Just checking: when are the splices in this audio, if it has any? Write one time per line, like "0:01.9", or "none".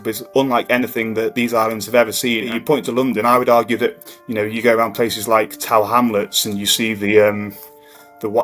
0:02.5